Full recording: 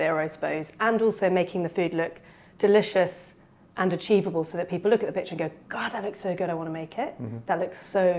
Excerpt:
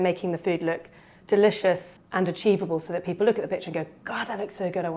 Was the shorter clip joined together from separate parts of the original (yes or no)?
yes